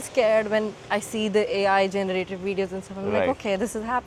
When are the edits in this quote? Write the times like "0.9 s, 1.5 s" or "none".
none